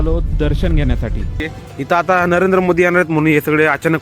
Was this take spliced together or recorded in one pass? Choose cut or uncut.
cut